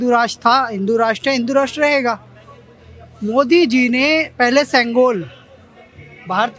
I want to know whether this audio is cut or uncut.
uncut